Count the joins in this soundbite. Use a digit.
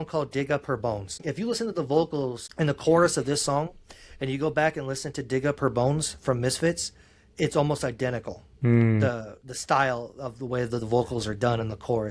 2